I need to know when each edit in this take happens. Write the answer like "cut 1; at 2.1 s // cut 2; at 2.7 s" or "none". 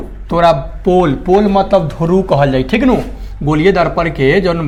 none